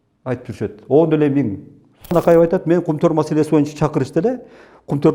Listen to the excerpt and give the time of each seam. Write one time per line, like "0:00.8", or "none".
0:02.1